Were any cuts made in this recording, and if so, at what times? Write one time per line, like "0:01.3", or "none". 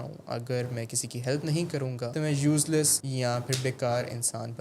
0:02.1
0:03.0